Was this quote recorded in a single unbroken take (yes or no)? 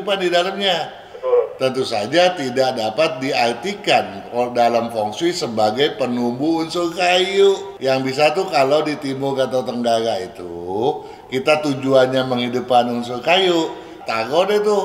no